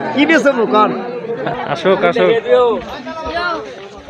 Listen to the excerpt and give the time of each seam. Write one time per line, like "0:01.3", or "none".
0:01.5